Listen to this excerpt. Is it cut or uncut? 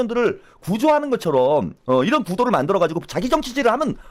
uncut